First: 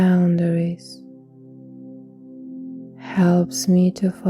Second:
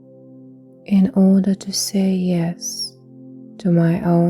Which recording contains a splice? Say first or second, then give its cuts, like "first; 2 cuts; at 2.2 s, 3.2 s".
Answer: second; 1 cut; at 0.9 s